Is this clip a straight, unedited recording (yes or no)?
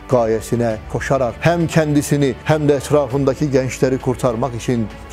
no